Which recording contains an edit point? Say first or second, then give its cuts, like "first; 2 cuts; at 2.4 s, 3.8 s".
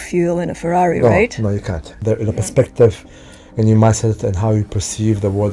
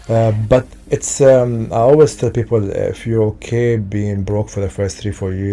first; 1 cut; at 1.9 s